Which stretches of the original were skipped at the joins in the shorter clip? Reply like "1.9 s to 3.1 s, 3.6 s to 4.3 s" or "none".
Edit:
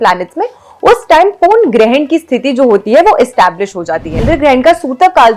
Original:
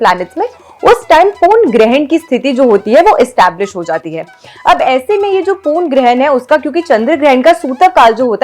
4.2 s to 7.0 s